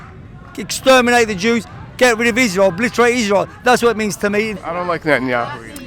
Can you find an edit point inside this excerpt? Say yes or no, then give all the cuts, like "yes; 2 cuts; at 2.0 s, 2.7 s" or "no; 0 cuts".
yes; 1 cut; at 4.6 s